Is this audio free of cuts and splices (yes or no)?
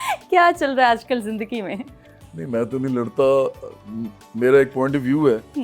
yes